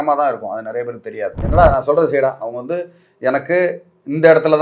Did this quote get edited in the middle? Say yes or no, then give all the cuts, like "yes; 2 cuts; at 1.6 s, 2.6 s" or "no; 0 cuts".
yes; 1 cut; at 1.4 s